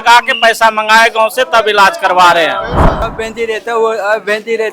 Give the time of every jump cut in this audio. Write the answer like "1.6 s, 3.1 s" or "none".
3.2 s